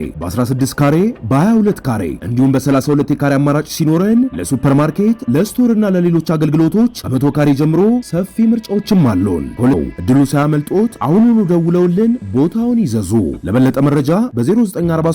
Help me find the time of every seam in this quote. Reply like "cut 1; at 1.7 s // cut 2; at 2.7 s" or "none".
cut 1; at 9.8 s